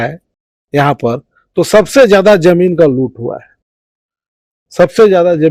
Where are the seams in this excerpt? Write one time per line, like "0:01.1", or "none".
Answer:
none